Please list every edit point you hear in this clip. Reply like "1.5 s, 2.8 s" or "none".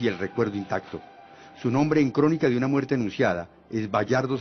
2.2 s